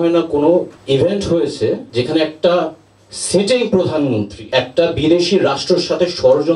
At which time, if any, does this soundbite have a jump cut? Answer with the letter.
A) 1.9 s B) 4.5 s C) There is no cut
C